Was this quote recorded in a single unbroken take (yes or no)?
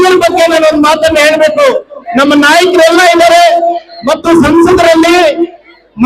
no